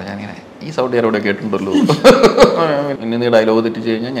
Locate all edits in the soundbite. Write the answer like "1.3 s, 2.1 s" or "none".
2.9 s